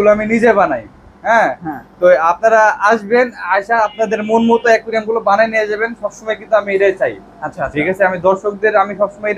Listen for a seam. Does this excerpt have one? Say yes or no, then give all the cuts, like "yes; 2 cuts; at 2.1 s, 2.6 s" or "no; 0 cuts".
no; 0 cuts